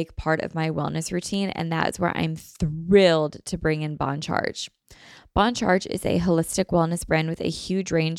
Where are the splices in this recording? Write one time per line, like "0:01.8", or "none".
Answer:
none